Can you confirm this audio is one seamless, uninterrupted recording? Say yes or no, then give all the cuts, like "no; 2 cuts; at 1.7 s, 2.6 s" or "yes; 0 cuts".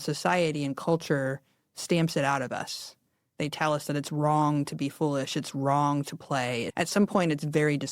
no; 1 cut; at 6.7 s